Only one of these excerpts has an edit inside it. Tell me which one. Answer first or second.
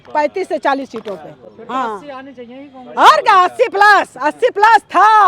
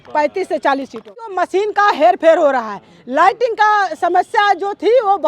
second